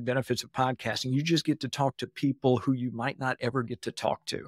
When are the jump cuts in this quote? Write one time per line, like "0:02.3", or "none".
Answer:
none